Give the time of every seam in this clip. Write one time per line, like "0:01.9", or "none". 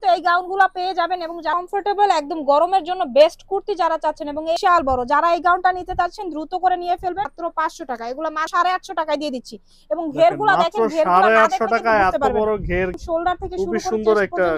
0:01.5
0:04.6
0:07.3
0:08.5
0:12.9